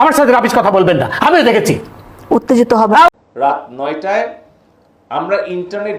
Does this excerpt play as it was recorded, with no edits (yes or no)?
no